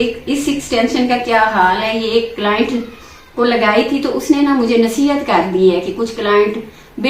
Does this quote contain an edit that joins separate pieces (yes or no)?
no